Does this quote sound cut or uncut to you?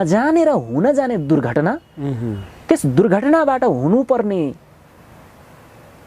uncut